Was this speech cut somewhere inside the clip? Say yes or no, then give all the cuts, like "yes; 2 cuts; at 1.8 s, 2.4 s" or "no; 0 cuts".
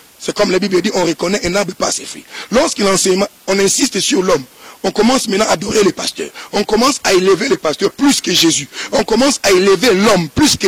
no; 0 cuts